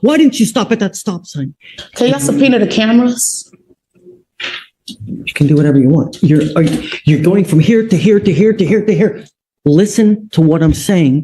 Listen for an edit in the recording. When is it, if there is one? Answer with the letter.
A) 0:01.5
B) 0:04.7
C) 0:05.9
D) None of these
A